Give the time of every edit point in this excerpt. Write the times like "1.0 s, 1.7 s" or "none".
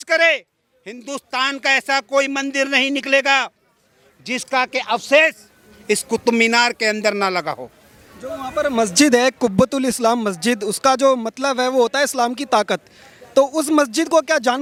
none

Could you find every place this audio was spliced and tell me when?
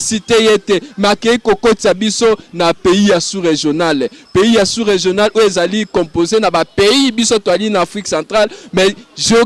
none

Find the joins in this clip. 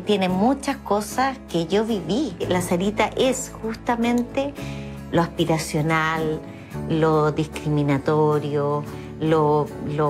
none

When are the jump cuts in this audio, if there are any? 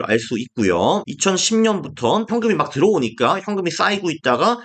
1.1 s, 2.3 s

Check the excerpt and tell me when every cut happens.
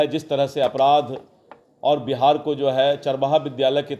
none

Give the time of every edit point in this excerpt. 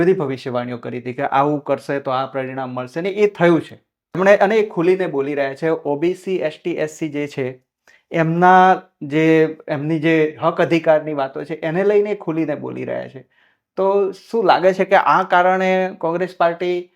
4.2 s

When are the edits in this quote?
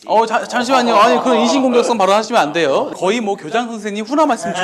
2.9 s

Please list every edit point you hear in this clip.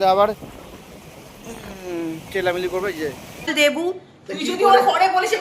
3.5 s

